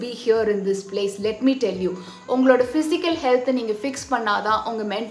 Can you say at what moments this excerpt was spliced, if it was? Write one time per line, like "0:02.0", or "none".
none